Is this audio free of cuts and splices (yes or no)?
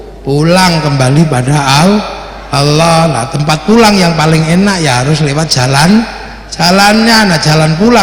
yes